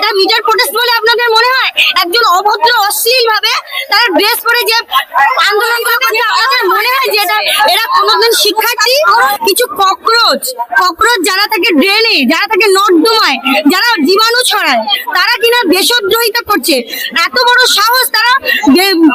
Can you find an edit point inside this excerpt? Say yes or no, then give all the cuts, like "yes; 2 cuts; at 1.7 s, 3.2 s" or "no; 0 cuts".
yes; 1 cut; at 9.3 s